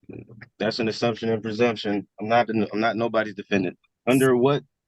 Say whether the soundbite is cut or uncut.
cut